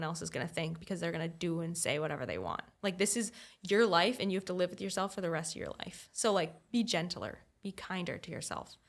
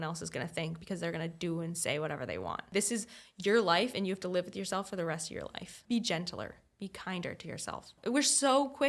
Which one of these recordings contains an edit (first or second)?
second